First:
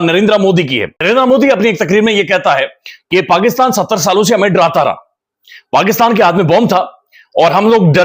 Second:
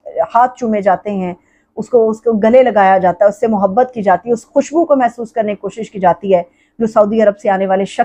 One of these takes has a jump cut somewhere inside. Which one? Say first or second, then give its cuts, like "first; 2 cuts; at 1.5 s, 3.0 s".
first; 1 cut; at 0.9 s